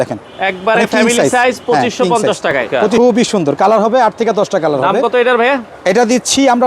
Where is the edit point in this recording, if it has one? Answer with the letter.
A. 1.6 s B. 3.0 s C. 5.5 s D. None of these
B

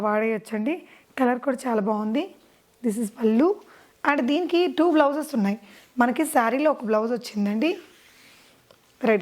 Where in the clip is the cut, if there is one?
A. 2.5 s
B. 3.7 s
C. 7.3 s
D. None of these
D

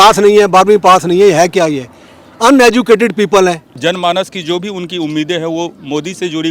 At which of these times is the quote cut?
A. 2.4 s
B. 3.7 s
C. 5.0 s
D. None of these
B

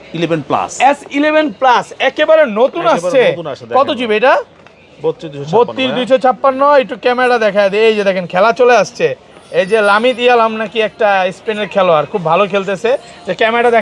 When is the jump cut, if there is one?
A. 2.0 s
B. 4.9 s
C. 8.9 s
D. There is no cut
D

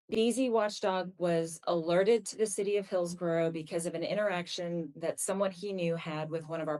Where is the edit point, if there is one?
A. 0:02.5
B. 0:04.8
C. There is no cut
C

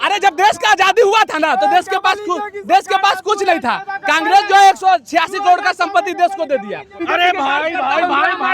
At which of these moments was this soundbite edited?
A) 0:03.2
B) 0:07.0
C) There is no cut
B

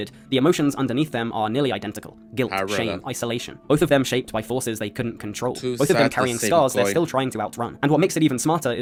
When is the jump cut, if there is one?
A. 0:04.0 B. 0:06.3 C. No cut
C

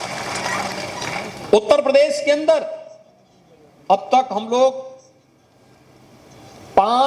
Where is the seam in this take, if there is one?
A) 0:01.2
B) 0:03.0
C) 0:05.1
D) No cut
D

